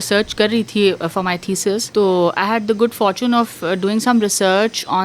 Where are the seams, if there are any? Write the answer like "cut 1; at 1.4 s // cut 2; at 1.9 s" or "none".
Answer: cut 1; at 1.9 s